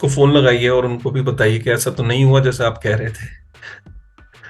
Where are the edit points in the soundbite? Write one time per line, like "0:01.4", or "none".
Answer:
none